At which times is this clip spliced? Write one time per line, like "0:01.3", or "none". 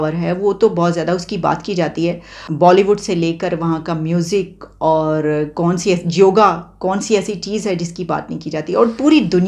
0:02.4

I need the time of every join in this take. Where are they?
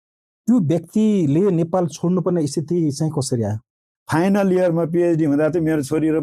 0:03.9

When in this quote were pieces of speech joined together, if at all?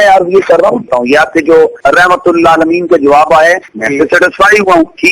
0:00.9
0:01.8
0:03.8

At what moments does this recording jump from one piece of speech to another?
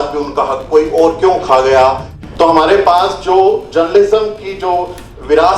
0:02.2

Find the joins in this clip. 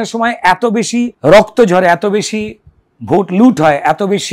0:01.1

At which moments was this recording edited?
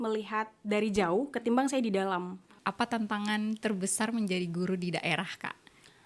0:02.6

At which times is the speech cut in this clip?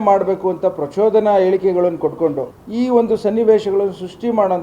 0:02.6

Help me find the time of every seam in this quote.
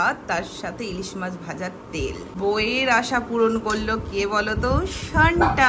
0:02.3

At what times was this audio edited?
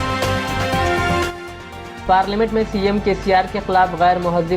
none

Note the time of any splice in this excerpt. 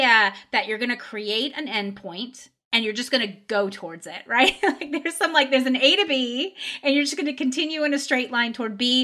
none

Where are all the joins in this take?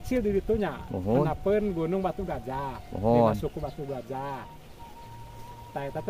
none

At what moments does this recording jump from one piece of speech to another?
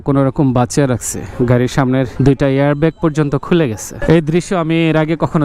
0:01.2
0:03.9

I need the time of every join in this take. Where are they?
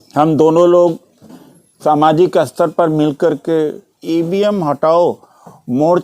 0:04.0

